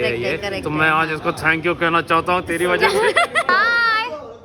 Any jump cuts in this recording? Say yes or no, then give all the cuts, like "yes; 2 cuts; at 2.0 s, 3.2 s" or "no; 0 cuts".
yes; 1 cut; at 3.5 s